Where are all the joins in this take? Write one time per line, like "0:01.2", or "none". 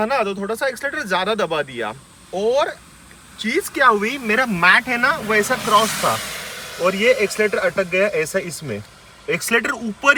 none